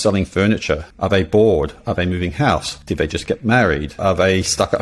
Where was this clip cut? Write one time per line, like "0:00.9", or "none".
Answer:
0:00.9
0:02.8
0:04.0